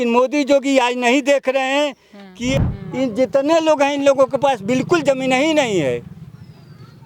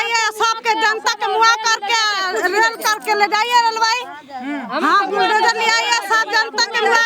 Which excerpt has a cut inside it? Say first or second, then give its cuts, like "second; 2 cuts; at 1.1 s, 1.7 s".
first; 1 cut; at 2.5 s